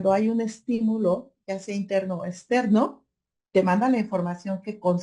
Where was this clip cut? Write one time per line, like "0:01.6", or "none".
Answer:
none